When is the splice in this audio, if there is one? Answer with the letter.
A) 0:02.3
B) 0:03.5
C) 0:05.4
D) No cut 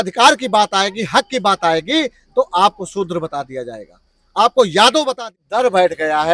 C